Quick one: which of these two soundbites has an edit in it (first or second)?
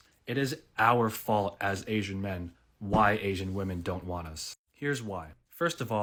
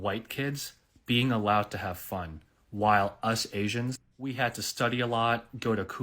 second